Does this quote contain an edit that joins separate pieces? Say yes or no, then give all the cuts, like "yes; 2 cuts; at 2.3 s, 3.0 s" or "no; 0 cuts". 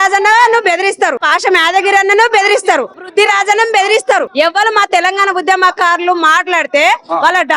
yes; 3 cuts; at 1.2 s, 3.1 s, 4.3 s